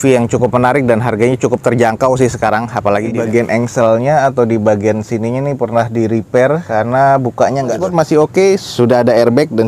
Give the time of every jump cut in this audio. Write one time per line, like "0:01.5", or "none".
0:03.2
0:07.8